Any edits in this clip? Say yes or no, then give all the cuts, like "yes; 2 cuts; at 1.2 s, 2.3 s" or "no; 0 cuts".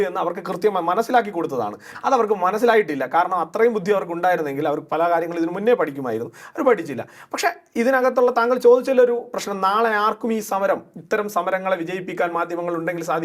no; 0 cuts